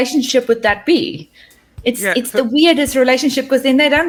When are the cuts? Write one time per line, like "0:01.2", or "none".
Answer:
none